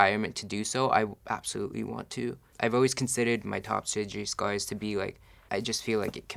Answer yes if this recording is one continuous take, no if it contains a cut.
no